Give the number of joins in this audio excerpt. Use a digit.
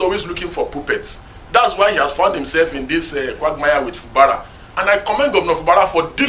0